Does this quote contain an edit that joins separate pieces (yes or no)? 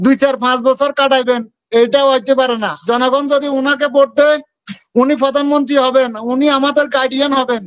yes